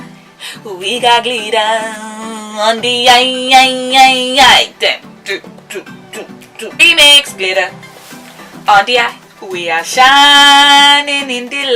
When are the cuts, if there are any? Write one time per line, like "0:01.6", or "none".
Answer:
0:09.2